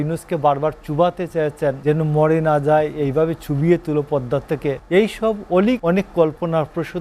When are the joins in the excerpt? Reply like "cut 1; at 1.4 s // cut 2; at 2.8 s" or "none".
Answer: cut 1; at 1.8 s // cut 2; at 4.8 s // cut 3; at 5.8 s